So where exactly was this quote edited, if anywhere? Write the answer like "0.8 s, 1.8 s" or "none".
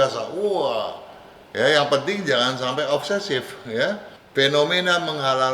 4.1 s